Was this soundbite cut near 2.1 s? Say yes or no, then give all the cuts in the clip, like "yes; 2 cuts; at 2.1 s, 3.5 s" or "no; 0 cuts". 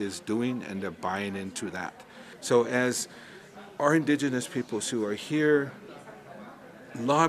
yes; 1 cut; at 2.1 s